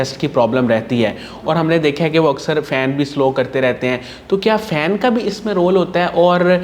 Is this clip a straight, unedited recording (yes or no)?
yes